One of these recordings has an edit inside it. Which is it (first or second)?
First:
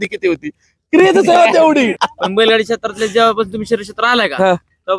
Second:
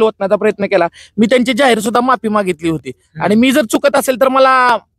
first